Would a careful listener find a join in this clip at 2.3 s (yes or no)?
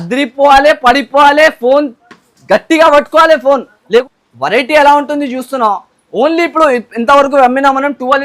no